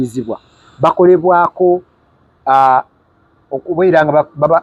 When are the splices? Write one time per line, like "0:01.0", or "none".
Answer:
none

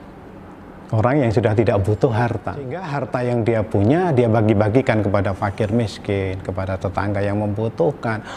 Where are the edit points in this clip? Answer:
0:02.9

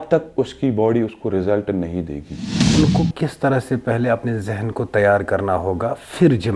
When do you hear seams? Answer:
0:02.7

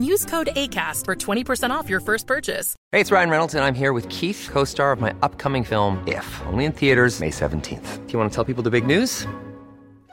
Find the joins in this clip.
0:02.7

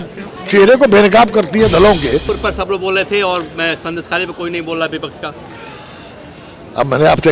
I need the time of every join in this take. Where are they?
0:02.3

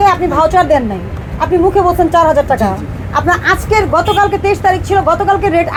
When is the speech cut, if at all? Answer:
none

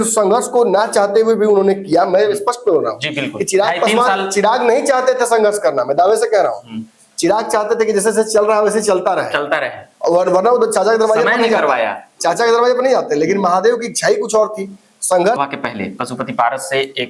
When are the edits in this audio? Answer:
0:15.4

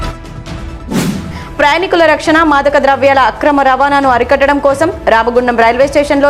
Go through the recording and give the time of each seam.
0:01.0

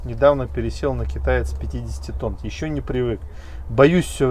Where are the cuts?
0:02.4

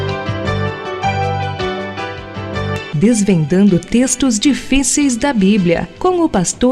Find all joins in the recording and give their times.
none

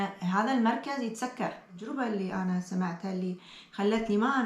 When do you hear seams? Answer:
0:01.8

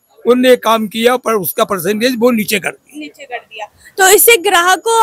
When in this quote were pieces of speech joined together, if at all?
none

